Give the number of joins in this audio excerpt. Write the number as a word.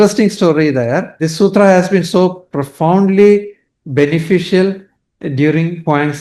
one